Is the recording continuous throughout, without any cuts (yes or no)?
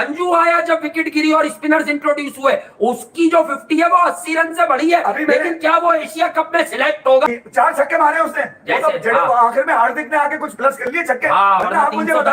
yes